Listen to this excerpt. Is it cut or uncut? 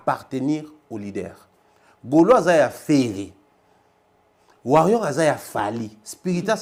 uncut